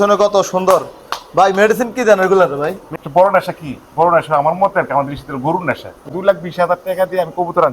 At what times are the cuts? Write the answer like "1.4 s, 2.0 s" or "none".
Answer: 2.9 s, 6.1 s

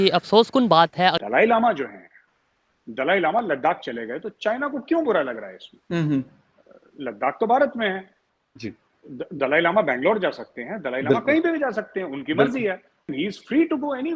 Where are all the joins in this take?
1.2 s, 13.1 s

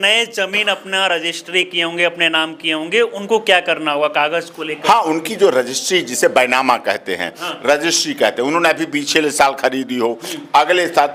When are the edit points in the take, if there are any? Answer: none

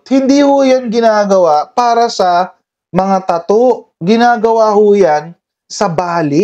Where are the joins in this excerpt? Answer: none

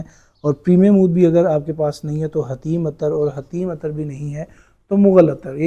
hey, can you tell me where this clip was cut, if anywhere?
none

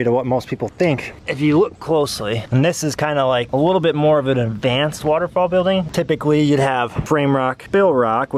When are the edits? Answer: 1.2 s, 5.9 s

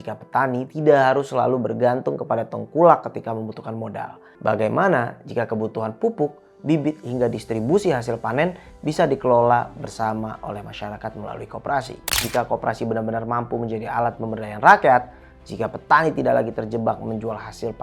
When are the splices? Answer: 12.2 s

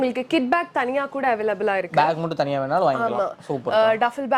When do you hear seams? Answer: none

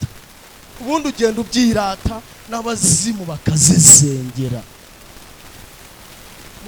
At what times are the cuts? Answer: none

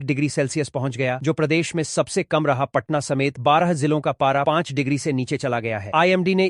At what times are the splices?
none

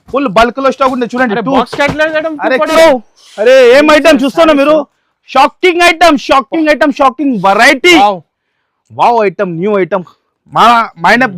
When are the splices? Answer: 2.7 s

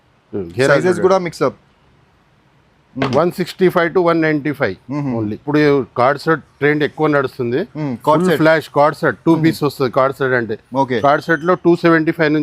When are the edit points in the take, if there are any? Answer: 5.4 s

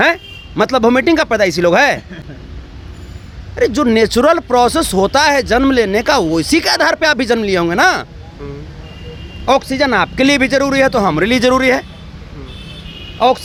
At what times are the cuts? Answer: none

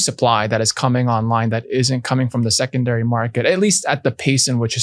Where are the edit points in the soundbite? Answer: none

